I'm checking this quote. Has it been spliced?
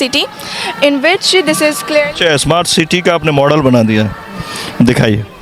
no; 0 cuts

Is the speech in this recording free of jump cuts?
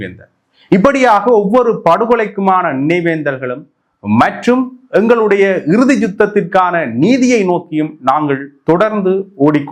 yes; 0 cuts

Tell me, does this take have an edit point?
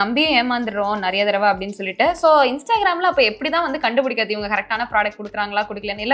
no; 0 cuts

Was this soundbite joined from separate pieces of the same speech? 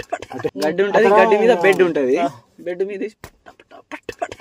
no; 0 cuts

